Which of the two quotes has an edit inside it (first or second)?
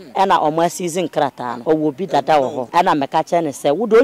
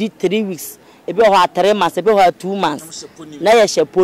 first